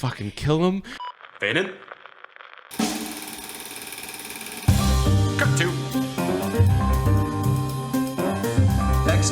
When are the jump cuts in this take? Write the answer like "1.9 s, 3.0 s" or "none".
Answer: 0.9 s